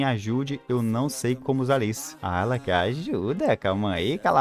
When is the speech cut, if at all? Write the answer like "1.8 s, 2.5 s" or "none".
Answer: 2.1 s